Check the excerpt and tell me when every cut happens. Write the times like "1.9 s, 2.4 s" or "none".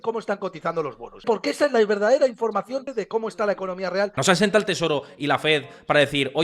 1.2 s, 2.8 s, 4.2 s